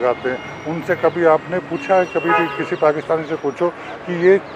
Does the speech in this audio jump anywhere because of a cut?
no; 0 cuts

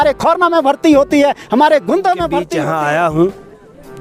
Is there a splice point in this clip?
yes; 1 cut; at 2.5 s

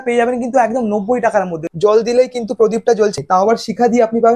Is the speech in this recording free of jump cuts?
no; 2 cuts; at 1.6 s, 3.2 s

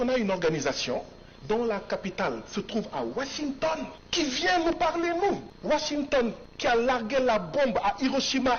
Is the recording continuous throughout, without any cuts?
no; 3 cuts; at 4.0 s, 5.5 s, 6.5 s

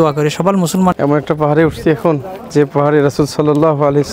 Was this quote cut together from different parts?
yes; 1 cut; at 0.9 s

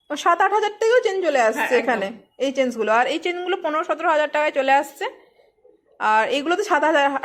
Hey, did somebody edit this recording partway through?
no; 0 cuts

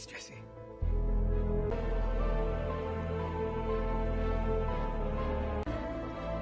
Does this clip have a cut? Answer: yes; 1 cut; at 1.7 s

